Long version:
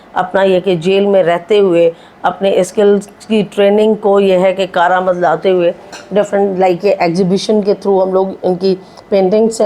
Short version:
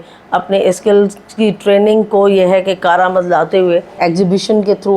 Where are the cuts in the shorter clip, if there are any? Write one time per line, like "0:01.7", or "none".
0:04.0